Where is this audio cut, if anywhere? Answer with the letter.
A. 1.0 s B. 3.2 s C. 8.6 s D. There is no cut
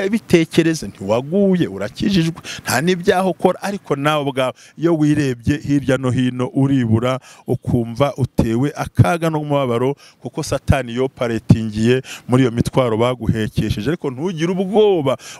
D